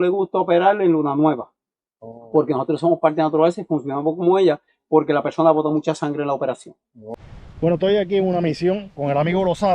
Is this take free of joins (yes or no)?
no